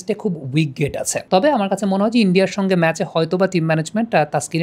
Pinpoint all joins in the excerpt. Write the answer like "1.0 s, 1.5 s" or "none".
1.2 s